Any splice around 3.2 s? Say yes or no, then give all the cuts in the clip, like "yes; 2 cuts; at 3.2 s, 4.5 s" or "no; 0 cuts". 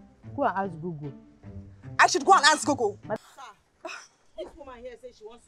yes; 1 cut; at 3.2 s